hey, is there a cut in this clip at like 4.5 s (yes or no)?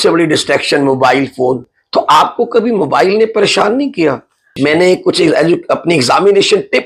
yes